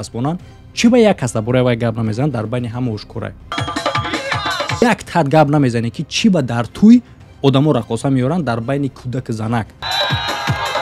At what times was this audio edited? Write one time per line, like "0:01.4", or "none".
0:03.4
0:04.8
0:09.8